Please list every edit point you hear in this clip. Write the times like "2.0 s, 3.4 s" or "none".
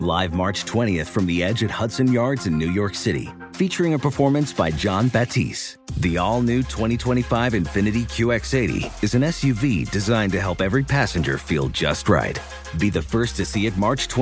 none